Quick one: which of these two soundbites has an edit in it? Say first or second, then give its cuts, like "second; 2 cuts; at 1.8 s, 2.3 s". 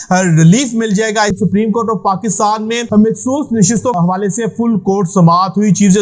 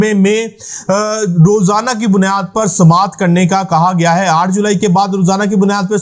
first; 3 cuts; at 1.3 s, 2.8 s, 4.0 s